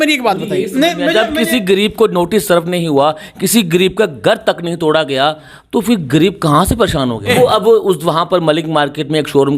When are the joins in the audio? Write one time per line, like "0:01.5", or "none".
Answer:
0:07.3